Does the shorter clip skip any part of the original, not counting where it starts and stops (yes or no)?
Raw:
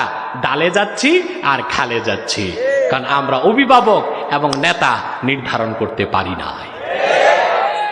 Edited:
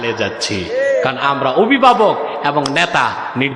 no